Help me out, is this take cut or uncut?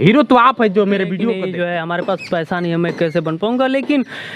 cut